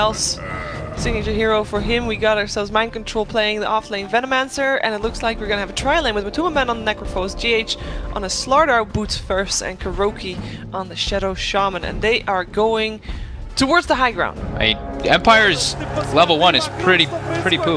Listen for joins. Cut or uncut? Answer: cut